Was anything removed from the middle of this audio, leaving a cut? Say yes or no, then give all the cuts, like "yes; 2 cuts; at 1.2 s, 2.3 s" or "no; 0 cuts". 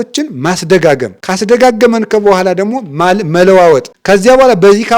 yes; 2 cuts; at 1.2 s, 3.9 s